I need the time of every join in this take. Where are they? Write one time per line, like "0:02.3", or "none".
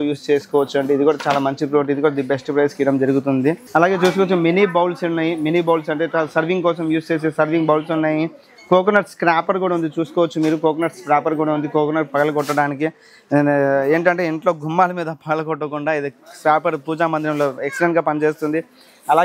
none